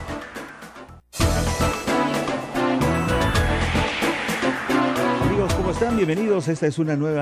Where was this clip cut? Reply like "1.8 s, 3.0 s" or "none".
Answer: 1.0 s, 2.5 s